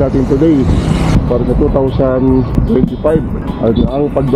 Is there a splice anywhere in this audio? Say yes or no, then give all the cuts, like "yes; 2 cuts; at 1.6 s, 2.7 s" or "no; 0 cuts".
yes; 3 cuts; at 1.1 s, 2.5 s, 3.4 s